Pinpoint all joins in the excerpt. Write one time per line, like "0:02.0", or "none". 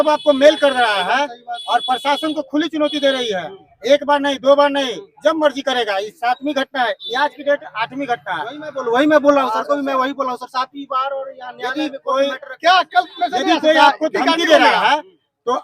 none